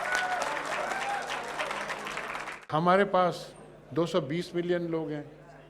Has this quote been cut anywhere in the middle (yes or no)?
yes